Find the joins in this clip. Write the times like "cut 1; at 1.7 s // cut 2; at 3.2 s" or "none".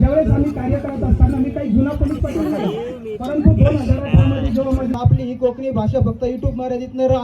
cut 1; at 4.9 s